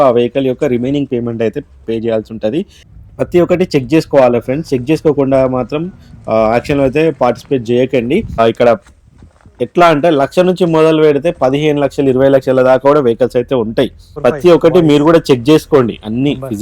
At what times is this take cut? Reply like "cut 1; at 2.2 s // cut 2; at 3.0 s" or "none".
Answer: cut 1; at 2.8 s // cut 2; at 8.4 s // cut 3; at 14.0 s